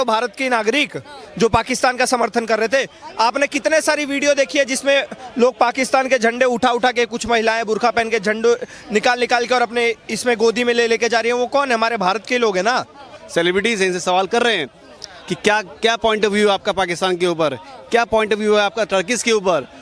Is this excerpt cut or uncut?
cut